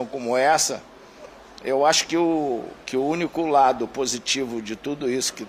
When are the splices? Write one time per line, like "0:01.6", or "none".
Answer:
none